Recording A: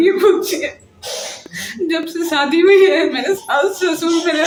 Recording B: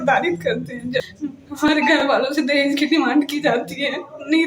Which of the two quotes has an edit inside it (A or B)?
B